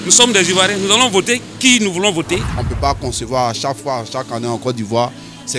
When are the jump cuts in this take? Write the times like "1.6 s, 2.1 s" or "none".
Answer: 2.6 s